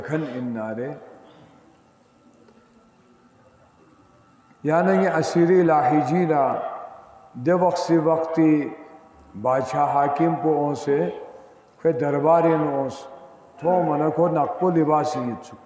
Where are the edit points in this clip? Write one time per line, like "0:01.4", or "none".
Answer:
0:13.5